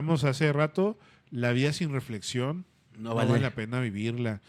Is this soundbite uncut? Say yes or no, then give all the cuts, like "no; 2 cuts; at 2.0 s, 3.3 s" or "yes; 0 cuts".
yes; 0 cuts